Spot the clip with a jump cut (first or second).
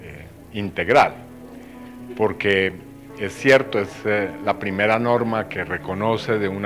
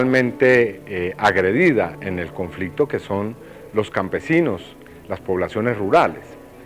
second